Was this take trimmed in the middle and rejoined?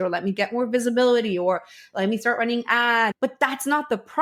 yes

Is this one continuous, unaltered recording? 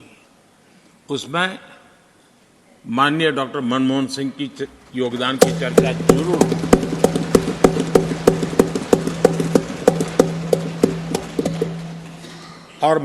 yes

